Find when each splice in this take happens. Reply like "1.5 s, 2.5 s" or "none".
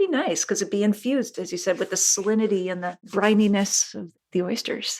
2.9 s